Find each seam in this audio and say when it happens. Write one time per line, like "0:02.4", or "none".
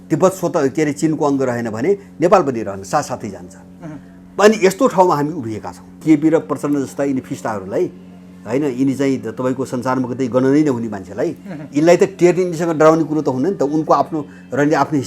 0:06.0